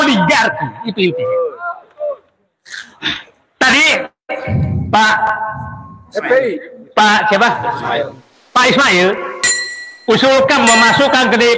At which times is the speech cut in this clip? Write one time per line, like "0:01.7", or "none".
none